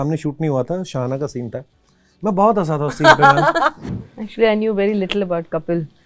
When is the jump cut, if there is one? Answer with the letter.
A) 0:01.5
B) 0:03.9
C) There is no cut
B